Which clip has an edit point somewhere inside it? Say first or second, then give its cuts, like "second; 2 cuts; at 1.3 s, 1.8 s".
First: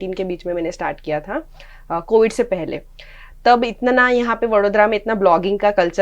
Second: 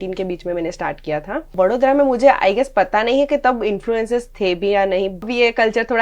second; 2 cuts; at 1.5 s, 5.3 s